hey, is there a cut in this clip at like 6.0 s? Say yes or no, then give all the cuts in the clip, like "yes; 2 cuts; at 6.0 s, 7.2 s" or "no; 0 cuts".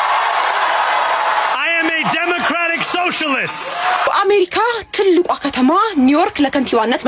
no; 0 cuts